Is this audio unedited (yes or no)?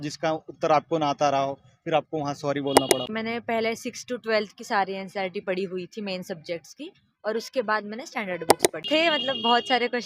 no